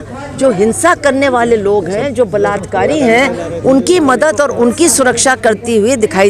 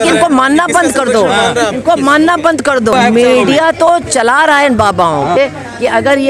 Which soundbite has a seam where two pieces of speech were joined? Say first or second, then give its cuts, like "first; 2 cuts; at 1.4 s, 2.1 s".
second; 2 cuts; at 2.9 s, 5.4 s